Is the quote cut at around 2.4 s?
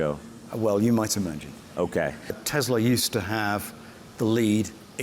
yes; 1 cut; at 2.4 s

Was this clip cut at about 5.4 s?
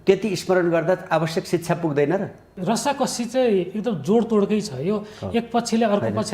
no; 1 cut; at 2.5 s

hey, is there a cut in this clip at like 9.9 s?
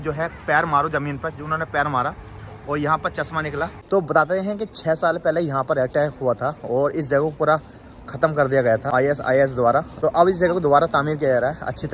yes; 3 cuts; at 4.1 s, 8.9 s, 9.9 s

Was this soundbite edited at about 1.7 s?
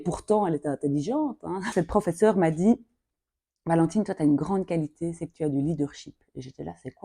yes; 1 cut; at 1.7 s

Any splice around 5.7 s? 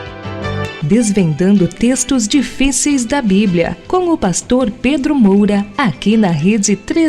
yes; 1 cut; at 5.7 s

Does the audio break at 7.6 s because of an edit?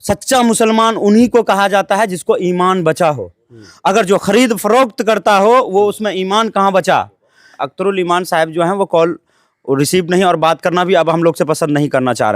yes; 1 cut; at 7.6 s

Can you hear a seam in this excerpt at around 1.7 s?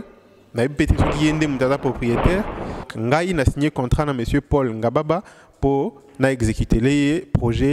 no; 1 cut; at 2.9 s

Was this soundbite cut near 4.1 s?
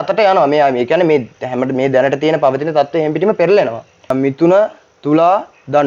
yes; 1 cut; at 4.1 s

